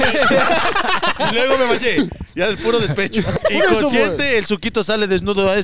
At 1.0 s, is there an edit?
no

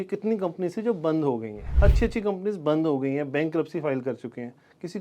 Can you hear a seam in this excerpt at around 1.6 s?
yes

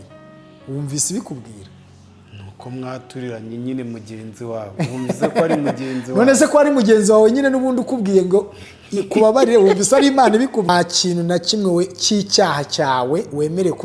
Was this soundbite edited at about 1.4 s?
no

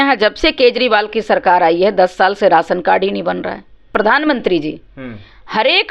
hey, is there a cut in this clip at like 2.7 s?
no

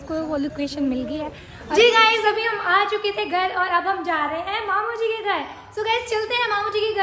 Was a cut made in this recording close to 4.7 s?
no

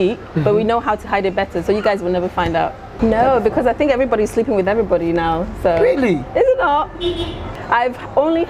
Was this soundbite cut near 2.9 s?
yes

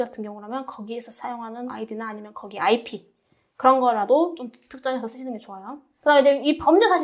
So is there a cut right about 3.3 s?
no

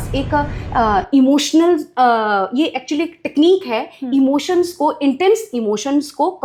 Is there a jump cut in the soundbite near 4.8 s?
no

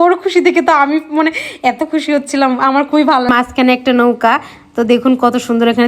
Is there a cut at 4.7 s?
no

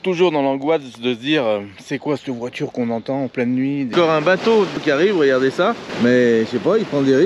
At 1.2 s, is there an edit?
no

